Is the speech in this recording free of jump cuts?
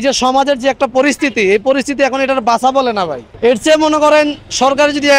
no; 1 cut; at 3.2 s

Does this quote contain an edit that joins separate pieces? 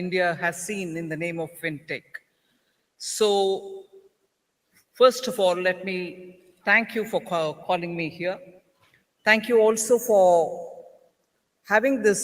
yes; 2 cuts; at 1.5 s, 7.8 s

